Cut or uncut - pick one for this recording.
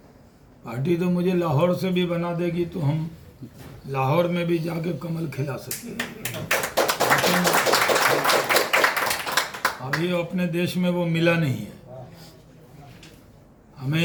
uncut